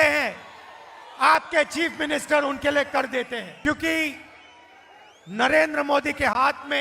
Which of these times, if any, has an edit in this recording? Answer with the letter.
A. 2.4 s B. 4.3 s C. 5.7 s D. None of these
D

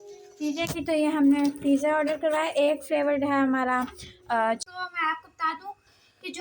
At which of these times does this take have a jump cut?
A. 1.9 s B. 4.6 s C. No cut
B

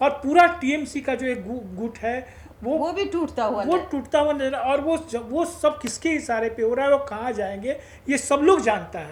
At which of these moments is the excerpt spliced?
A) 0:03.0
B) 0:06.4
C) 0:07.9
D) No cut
D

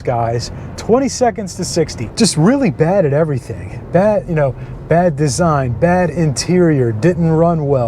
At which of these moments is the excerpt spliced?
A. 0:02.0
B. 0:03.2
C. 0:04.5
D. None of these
A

